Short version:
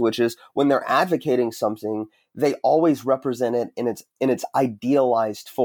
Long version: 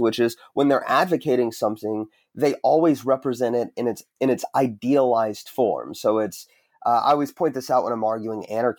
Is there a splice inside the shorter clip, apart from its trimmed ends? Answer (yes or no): no